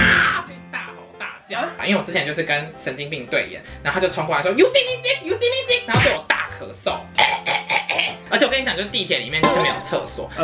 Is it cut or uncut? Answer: cut